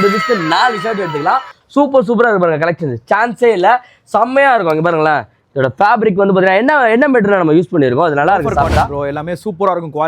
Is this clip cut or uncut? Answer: cut